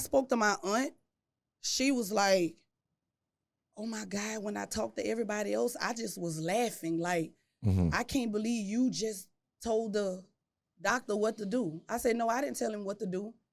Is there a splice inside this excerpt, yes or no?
no